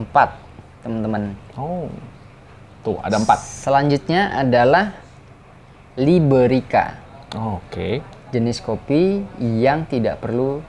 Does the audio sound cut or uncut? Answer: uncut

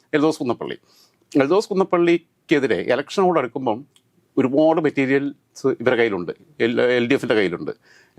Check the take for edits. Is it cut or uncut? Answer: uncut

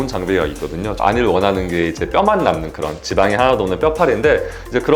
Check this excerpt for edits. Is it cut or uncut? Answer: cut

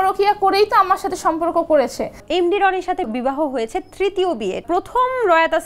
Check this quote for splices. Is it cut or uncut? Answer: cut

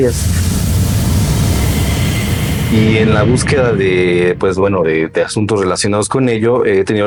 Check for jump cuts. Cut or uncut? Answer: uncut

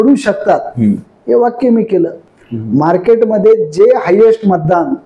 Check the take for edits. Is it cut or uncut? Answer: cut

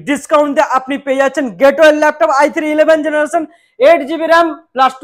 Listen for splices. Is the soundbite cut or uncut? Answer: uncut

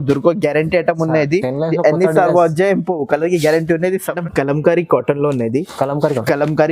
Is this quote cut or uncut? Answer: cut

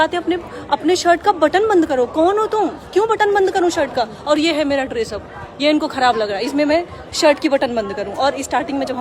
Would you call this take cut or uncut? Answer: uncut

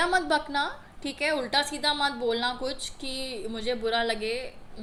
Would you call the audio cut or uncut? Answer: uncut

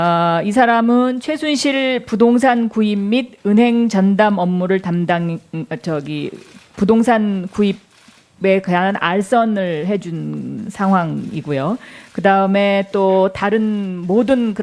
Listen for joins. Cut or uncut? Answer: cut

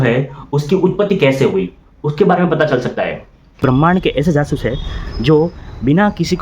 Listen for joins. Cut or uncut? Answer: cut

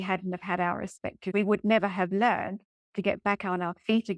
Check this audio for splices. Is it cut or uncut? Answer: cut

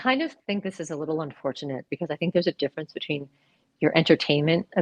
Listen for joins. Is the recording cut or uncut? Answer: uncut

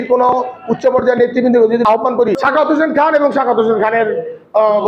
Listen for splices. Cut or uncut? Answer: cut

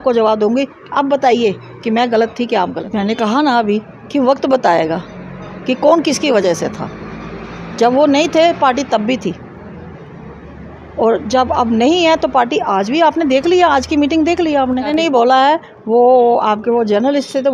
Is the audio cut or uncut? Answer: cut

